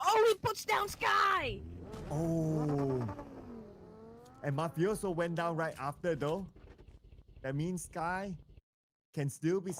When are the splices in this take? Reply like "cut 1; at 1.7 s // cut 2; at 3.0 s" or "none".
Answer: none